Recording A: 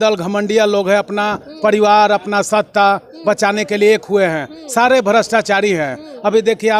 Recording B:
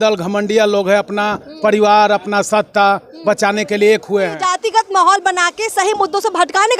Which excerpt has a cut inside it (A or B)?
B